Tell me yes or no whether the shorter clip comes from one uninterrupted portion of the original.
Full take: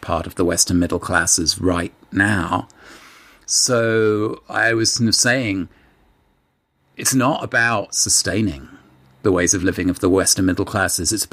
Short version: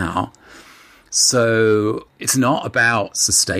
no